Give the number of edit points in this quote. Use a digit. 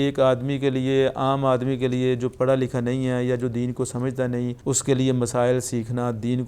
1